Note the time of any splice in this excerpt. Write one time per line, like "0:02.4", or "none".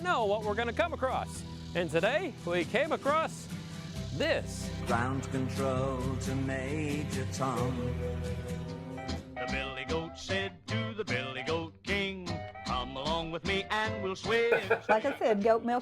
0:08.9
0:14.6